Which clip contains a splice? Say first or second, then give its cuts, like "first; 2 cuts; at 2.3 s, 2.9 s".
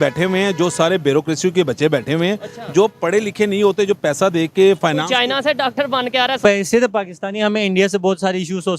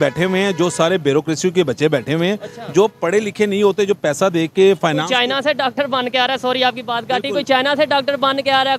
first; 1 cut; at 6.4 s